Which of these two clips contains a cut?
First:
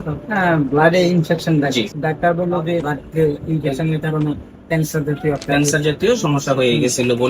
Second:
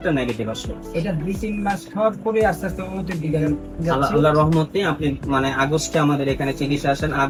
first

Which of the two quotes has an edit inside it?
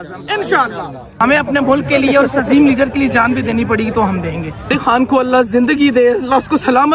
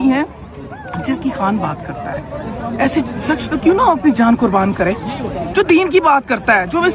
first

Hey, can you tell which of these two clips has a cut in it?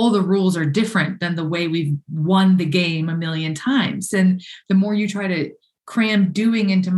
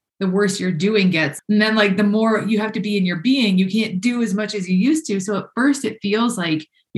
second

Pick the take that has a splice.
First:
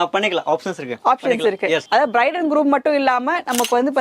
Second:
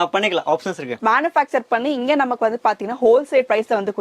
second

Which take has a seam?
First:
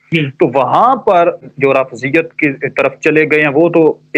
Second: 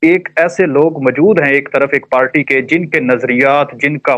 first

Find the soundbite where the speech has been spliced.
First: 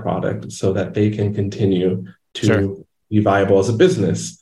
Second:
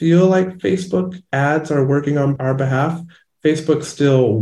second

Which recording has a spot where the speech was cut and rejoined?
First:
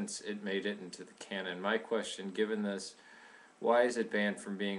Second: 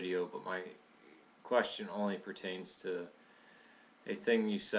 first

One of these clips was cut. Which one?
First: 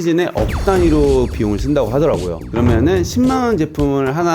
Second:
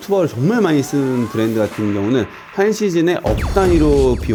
first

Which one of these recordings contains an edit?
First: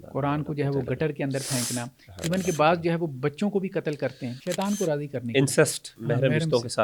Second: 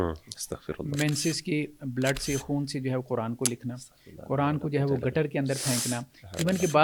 first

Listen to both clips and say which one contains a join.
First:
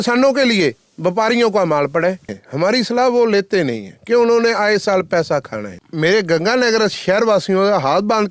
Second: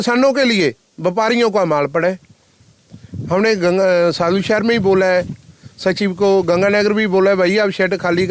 first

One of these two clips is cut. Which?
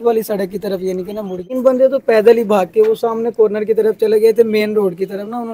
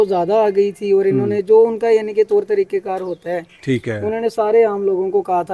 first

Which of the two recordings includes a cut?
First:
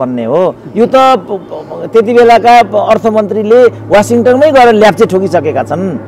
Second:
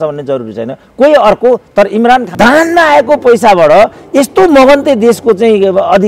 second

